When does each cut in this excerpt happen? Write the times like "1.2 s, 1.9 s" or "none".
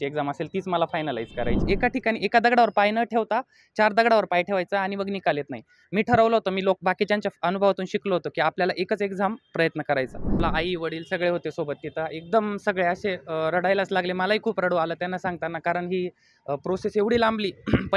1.6 s, 10.4 s